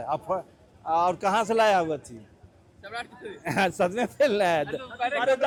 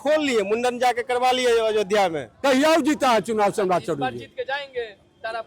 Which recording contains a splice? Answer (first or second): second